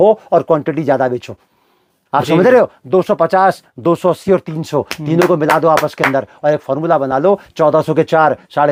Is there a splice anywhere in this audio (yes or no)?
no